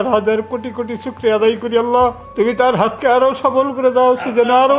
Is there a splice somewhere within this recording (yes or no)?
yes